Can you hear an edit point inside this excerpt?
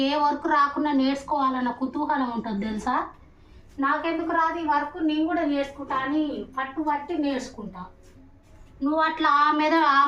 no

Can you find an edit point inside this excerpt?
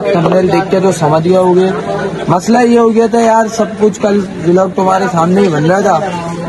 no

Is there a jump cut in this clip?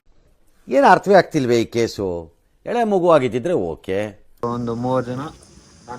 yes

